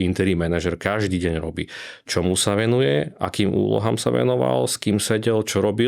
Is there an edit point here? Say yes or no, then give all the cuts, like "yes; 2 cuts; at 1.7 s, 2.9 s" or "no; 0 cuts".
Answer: no; 0 cuts